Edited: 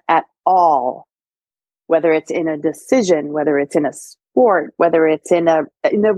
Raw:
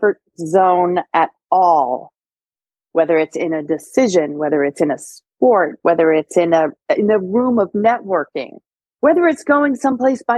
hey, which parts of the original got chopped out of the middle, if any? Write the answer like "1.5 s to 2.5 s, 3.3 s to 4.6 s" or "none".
none